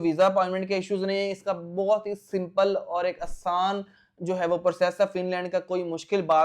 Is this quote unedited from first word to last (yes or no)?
yes